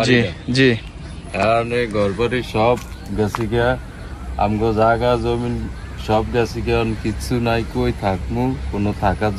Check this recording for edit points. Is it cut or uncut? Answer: uncut